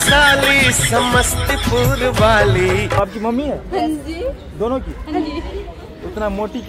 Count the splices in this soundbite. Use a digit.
1